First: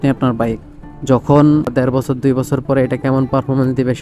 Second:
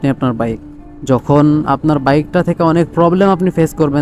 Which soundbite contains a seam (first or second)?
first